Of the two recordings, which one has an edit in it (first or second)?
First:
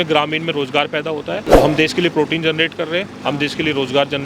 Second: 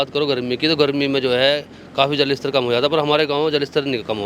first